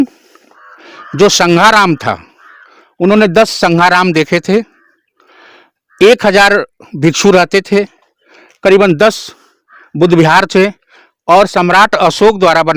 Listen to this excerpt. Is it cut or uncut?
uncut